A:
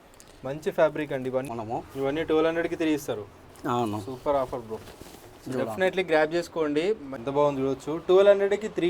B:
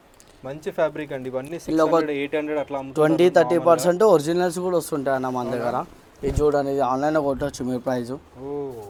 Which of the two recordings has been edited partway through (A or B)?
A